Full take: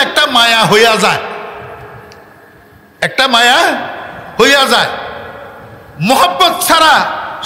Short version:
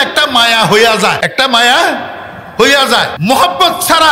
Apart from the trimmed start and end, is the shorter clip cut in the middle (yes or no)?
yes